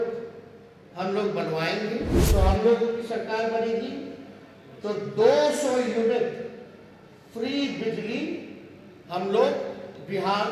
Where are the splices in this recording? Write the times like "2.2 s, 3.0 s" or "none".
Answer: 2.2 s